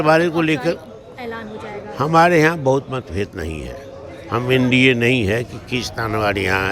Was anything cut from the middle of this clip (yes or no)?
no